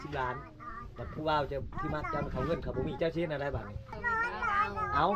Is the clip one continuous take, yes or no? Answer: no